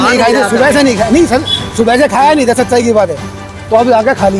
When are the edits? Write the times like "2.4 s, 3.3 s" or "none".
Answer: none